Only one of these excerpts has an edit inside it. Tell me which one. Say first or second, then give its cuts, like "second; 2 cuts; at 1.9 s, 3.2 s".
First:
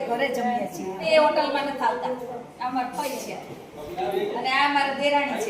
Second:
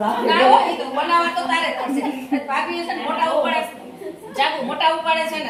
first; 1 cut; at 1.1 s